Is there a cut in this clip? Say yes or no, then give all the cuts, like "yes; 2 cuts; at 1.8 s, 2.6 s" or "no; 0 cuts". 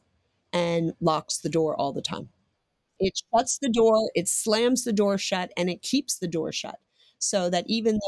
yes; 1 cut; at 2.9 s